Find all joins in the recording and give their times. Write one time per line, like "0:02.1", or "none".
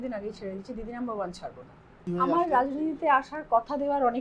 0:02.0